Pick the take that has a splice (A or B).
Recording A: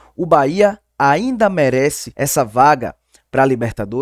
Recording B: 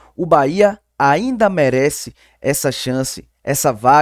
A